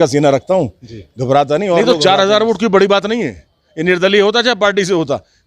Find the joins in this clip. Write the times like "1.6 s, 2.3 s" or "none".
1.8 s